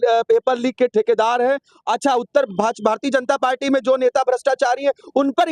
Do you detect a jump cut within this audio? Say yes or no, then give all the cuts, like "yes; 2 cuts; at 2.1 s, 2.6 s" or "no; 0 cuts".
no; 0 cuts